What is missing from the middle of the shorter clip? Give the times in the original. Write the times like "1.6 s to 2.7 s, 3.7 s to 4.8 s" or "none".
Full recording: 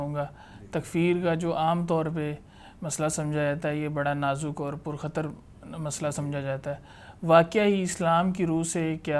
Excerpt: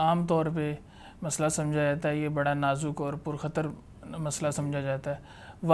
none